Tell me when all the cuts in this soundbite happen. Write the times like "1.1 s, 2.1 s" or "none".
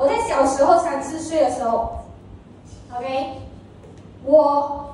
none